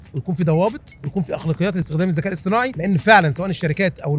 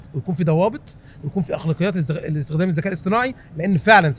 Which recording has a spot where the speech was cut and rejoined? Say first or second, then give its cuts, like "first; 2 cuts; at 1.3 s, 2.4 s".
first; 3 cuts; at 0.9 s, 1.9 s, 2.8 s